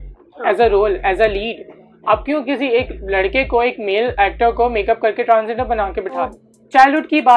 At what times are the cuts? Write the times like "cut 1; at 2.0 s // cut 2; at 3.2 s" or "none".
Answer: cut 1; at 6.3 s